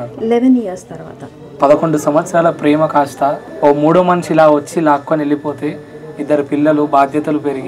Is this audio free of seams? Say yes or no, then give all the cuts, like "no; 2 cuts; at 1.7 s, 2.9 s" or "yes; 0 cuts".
no; 2 cuts; at 1.5 s, 3.5 s